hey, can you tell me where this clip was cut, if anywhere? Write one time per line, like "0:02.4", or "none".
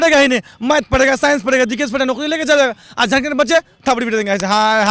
none